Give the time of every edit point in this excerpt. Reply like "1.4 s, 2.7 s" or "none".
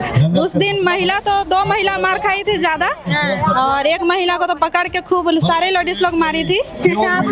none